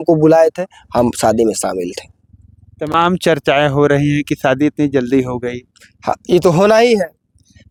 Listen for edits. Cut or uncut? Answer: uncut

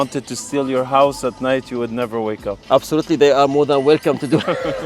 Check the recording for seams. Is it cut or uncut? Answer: uncut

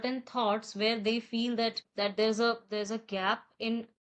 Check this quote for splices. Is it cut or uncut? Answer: cut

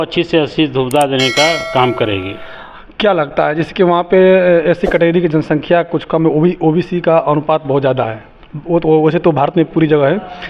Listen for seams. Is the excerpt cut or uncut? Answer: uncut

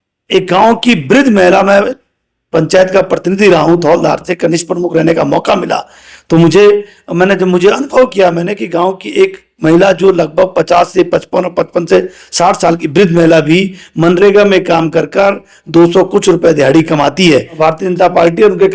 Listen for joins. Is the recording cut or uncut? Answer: cut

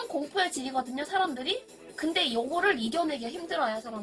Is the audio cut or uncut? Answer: uncut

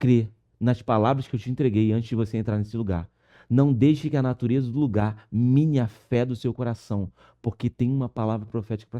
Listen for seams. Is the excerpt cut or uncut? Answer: uncut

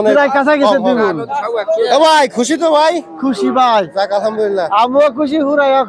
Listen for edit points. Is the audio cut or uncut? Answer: cut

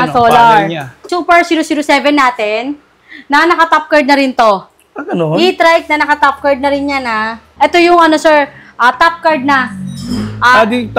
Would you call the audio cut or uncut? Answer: cut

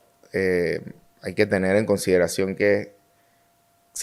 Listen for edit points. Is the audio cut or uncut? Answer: uncut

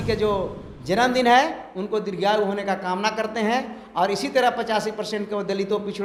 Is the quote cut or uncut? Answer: uncut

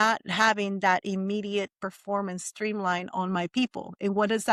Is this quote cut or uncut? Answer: uncut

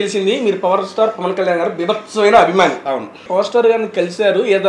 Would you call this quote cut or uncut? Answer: cut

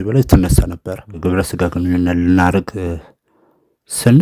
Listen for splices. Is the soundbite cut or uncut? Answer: cut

